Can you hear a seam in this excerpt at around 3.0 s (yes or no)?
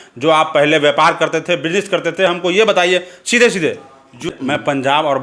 no